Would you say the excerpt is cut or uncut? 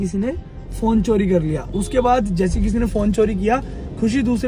uncut